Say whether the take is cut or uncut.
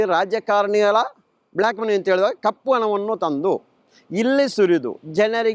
uncut